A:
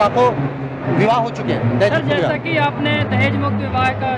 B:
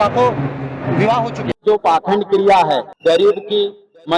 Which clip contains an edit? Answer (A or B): B